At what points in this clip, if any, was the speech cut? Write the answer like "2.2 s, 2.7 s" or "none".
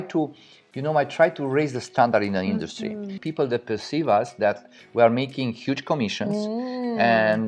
3.2 s